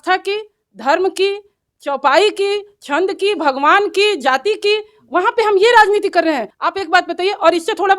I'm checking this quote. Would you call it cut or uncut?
cut